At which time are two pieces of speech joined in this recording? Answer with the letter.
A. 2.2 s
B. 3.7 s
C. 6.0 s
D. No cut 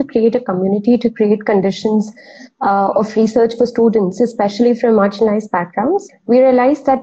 C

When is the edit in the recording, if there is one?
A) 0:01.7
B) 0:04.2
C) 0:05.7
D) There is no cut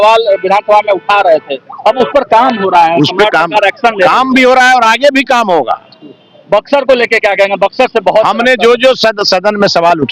D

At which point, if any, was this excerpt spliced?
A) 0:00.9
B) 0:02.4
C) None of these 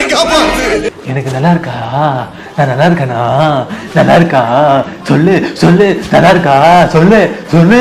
A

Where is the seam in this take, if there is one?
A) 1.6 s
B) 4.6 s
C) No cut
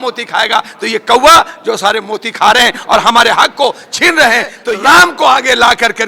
B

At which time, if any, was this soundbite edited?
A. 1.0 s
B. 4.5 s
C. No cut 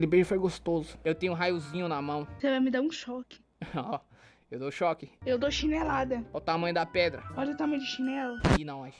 A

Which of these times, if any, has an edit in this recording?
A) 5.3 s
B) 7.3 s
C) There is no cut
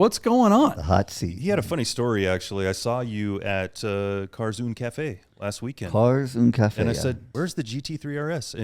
B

